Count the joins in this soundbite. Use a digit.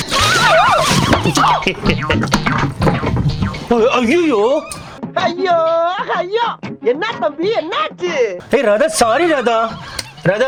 0